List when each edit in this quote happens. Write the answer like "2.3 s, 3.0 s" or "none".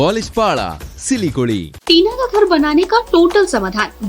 1.7 s